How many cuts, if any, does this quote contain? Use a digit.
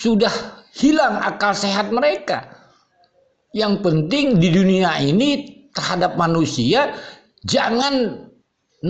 0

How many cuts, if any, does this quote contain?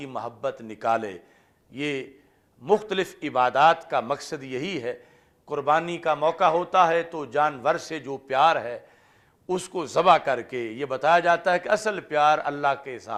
0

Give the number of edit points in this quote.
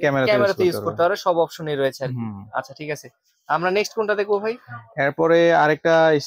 0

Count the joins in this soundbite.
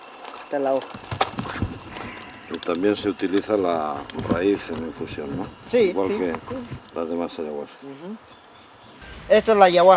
1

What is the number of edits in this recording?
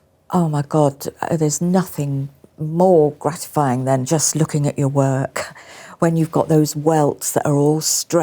1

